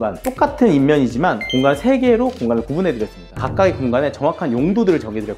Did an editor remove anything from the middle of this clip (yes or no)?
yes